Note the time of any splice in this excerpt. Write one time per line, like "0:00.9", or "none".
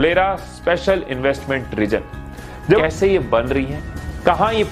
0:02.8